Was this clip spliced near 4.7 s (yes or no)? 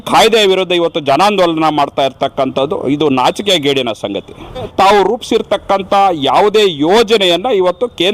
yes